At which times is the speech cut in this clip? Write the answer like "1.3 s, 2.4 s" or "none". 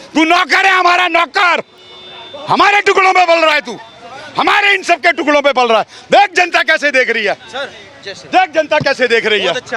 none